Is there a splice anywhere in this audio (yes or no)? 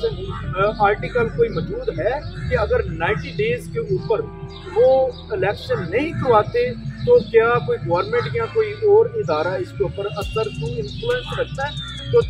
no